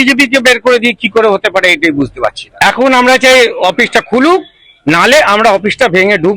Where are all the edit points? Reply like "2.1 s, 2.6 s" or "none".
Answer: 2.4 s